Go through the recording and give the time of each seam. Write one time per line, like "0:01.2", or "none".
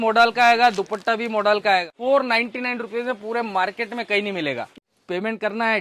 0:01.9
0:04.7

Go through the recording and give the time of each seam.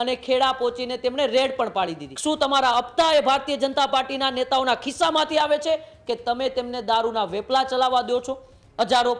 0:02.1

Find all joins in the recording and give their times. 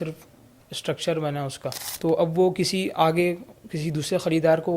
0:01.9

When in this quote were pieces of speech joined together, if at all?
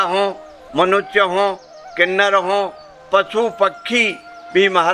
none

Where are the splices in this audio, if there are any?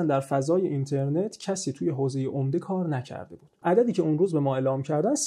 0:03.6

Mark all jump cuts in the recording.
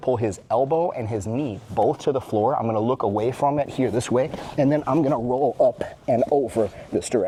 none

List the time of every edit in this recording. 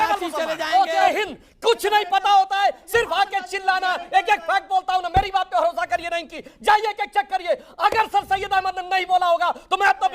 0:01.1

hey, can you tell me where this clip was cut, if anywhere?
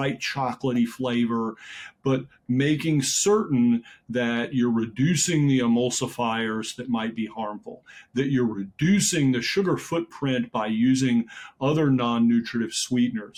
none

